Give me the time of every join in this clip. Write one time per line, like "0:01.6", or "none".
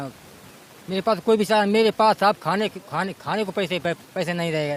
none